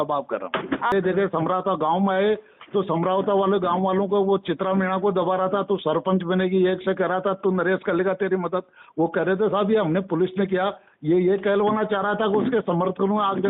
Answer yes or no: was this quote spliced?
yes